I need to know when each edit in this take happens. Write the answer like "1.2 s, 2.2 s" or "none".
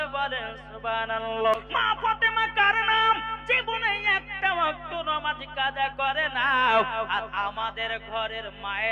1.5 s